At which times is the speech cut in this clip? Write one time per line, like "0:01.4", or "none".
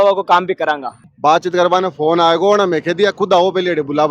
0:00.9